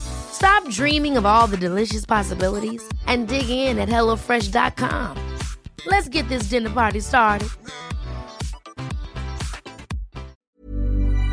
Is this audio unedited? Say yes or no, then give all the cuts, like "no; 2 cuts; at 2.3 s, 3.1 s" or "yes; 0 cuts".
no; 1 cut; at 10.4 s